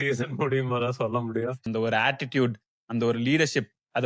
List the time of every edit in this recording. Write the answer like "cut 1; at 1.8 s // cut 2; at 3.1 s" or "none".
cut 1; at 1.6 s